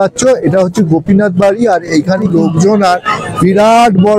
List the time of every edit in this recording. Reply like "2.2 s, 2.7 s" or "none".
2.3 s